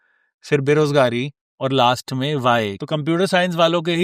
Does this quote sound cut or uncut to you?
cut